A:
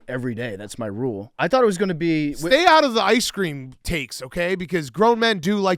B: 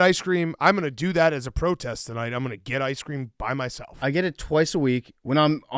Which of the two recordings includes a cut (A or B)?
A